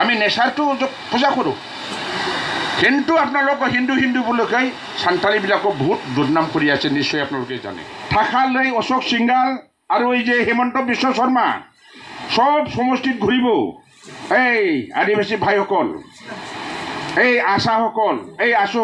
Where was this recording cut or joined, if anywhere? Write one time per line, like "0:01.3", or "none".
0:07.6